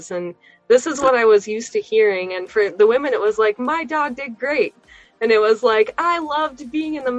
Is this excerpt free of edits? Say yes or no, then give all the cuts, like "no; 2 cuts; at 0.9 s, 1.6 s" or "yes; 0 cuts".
yes; 0 cuts